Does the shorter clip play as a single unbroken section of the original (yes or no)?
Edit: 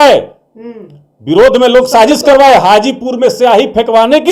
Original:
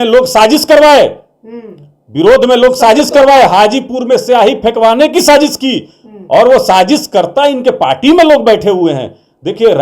yes